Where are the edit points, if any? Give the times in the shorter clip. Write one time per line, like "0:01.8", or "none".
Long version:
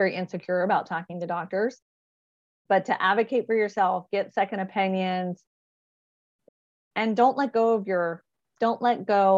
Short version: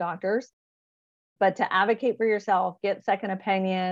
none